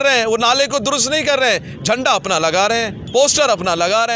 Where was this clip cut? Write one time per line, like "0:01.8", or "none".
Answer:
0:03.0